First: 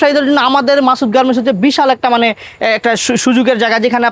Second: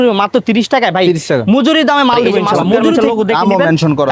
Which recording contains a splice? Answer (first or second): second